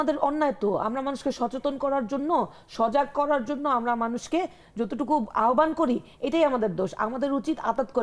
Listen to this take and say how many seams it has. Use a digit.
0